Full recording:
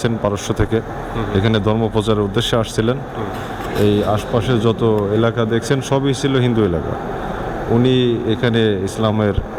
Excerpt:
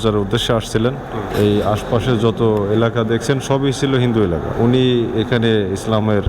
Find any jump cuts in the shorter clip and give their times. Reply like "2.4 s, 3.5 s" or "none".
1.3 s, 4.5 s